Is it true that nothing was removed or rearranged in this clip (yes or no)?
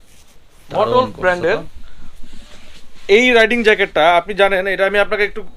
yes